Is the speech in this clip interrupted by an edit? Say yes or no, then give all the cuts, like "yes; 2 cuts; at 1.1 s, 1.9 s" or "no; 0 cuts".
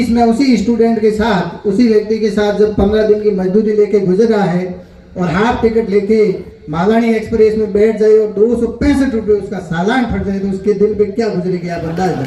no; 0 cuts